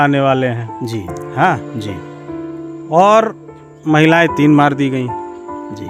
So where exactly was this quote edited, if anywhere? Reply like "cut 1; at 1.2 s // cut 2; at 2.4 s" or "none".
none

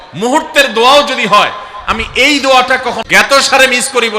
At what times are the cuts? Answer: cut 1; at 3.3 s

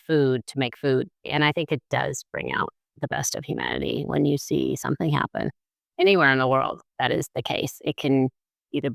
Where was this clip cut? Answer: cut 1; at 1.2 s

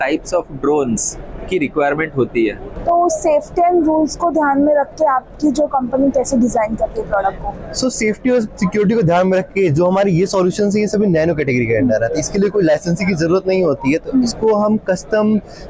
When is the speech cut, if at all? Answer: cut 1; at 2.7 s

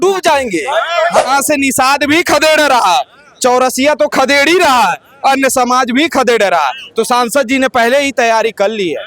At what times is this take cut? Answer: cut 1; at 1.2 s

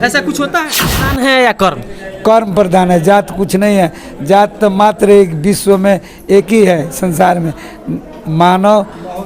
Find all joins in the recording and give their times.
cut 1; at 1.1 s

